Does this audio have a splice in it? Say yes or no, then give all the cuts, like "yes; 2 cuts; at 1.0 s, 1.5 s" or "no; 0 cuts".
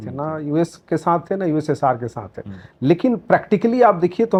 no; 0 cuts